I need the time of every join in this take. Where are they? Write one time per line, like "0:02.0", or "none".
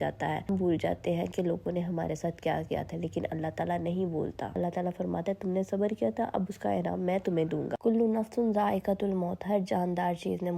none